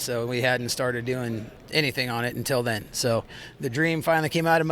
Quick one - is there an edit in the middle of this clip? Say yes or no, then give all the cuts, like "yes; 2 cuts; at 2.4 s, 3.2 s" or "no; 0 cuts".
yes; 2 cuts; at 1.5 s, 3.4 s